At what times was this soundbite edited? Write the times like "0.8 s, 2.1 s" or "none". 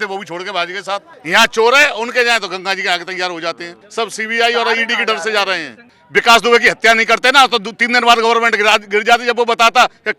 1.1 s, 3.8 s, 6.0 s